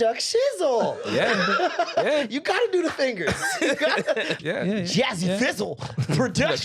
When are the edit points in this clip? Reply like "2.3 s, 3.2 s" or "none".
4.4 s